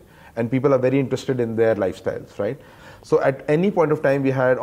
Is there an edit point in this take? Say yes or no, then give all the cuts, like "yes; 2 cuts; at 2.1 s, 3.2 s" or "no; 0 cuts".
yes; 1 cut; at 2.7 s